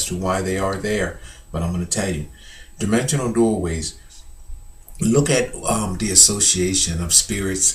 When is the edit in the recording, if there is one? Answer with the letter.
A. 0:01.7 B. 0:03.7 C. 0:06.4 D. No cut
B